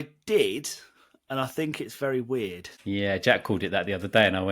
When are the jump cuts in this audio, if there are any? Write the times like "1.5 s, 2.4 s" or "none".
2.7 s